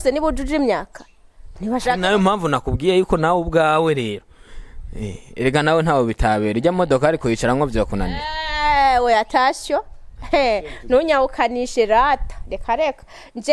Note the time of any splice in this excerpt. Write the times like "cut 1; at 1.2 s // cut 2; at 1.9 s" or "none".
none